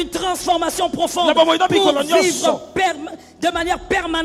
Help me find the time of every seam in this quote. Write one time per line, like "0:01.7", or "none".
none